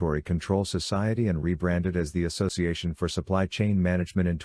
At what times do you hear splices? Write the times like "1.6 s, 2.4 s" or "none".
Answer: 2.5 s